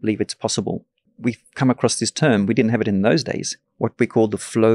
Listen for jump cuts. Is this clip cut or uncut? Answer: cut